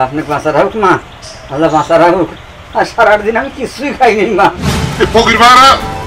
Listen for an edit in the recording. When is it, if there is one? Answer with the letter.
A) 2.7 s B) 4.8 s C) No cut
B